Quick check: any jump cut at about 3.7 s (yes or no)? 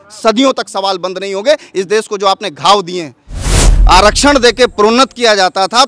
yes